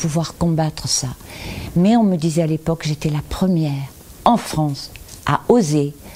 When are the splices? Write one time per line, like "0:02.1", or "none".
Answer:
none